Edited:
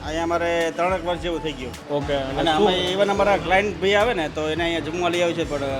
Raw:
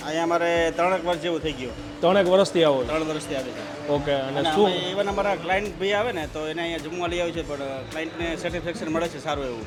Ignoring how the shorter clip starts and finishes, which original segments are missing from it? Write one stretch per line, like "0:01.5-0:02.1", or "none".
0:01.7-0:03.7